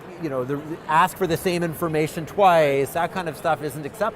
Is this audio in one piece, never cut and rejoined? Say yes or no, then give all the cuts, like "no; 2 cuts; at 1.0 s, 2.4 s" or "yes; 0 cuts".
no; 1 cut; at 2.9 s